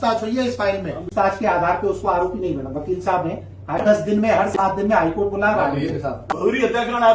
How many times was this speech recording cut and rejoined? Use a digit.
3